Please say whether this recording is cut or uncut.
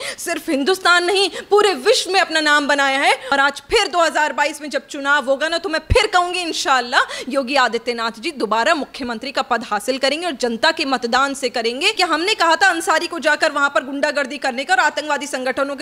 cut